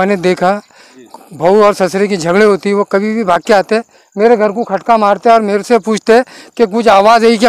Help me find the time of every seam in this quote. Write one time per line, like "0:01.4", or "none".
none